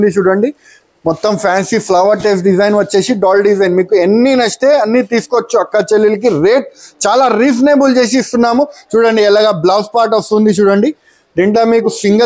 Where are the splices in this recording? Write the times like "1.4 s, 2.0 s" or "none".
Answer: none